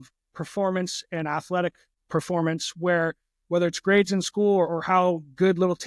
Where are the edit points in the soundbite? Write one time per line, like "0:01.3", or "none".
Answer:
0:01.9